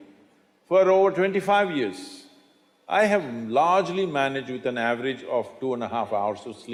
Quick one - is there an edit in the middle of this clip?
no; 0 cuts

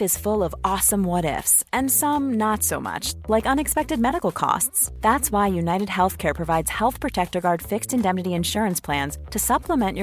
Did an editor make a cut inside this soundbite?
no; 0 cuts

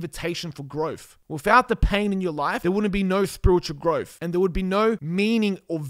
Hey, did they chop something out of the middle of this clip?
yes; 4 cuts; at 1.1 s, 2.6 s, 4.2 s, 5.0 s

